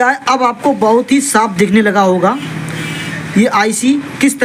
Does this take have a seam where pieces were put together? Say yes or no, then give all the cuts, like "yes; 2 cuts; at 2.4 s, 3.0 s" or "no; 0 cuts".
no; 0 cuts